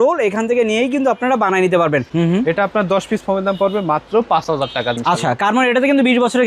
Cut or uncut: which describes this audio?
cut